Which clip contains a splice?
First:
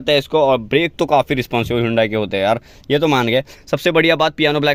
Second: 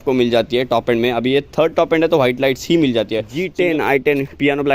second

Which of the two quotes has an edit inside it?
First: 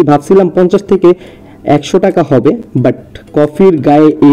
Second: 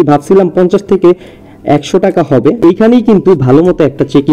second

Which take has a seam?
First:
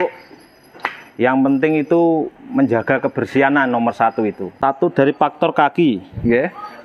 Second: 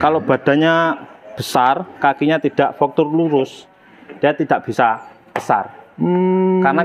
first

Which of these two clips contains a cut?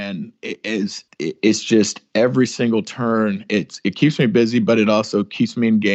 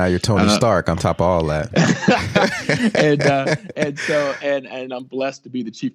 first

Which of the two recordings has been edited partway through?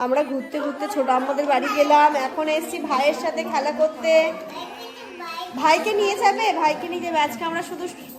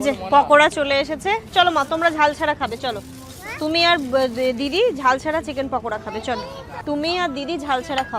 second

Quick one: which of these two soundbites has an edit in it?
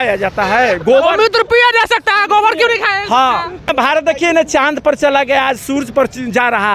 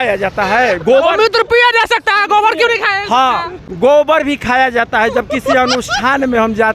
first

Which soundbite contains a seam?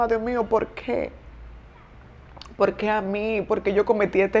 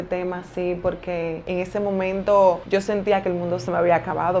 second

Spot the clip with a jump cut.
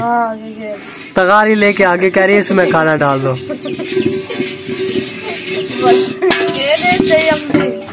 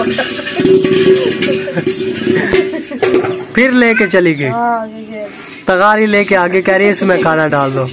second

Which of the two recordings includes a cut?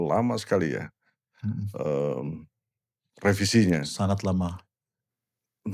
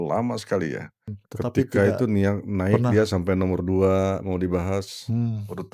second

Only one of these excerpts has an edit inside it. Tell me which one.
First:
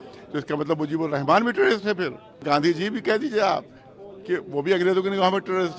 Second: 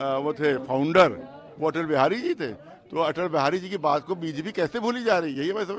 first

